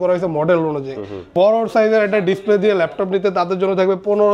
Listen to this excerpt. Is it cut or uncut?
cut